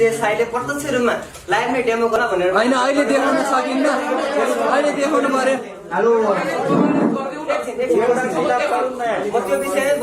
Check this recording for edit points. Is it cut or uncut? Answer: cut